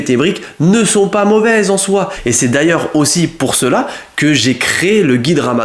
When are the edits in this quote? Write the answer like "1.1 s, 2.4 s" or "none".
2.1 s